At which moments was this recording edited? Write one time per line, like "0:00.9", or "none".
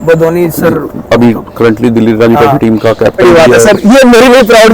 0:03.2